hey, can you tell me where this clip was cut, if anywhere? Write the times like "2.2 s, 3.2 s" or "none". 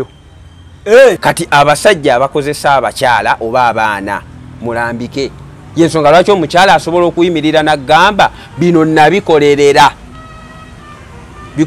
1.2 s